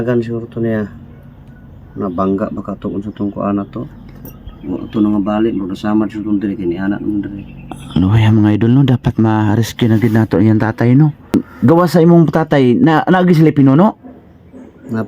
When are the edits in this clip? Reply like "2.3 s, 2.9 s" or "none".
11.3 s